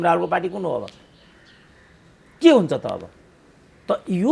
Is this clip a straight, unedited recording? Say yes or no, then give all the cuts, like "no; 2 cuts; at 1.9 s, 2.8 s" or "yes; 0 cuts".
yes; 0 cuts